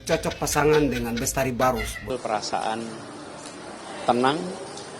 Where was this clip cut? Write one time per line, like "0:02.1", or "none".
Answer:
0:02.1